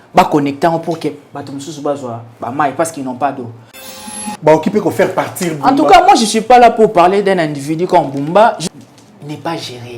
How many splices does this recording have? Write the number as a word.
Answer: two